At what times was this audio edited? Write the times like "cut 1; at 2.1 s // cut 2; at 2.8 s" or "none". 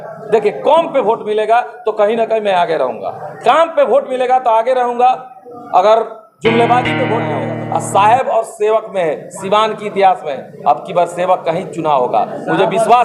cut 1; at 7.3 s